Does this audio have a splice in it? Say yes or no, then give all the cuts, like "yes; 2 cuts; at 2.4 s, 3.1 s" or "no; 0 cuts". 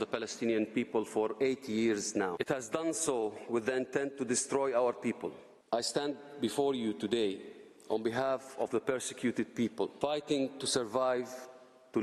yes; 3 cuts; at 2.3 s, 5.5 s, 9.9 s